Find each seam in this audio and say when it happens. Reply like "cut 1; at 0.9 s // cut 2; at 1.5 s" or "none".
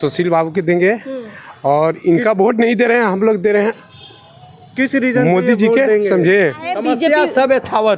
cut 1; at 6.7 s

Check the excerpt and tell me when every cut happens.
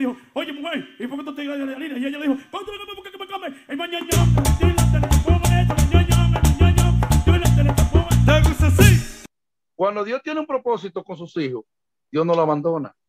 cut 1; at 9.5 s

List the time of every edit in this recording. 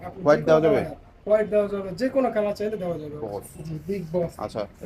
cut 1; at 3.2 s

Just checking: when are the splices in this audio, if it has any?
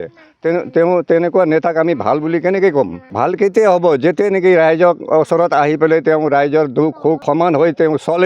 cut 1; at 3.0 s // cut 2; at 7.2 s

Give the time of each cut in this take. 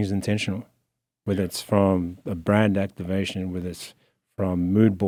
none

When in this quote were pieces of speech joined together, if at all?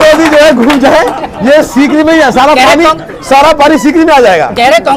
none

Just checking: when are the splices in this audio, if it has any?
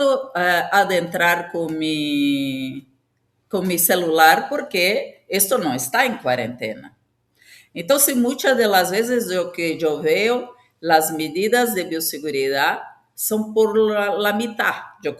none

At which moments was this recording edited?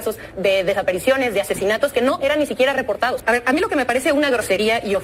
cut 1; at 3.2 s

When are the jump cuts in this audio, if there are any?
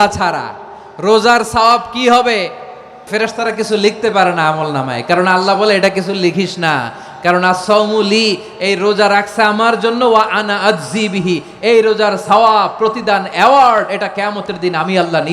cut 1; at 3.0 s

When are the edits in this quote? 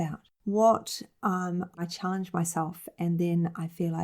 cut 1; at 1.8 s

